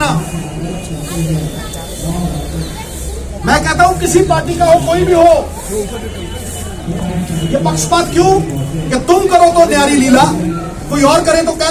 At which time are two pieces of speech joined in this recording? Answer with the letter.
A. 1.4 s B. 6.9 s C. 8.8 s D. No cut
D